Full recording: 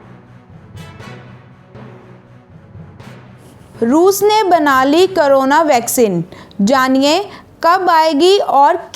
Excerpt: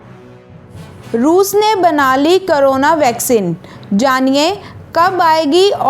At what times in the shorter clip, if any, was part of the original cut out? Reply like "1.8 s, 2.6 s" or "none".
1.0 s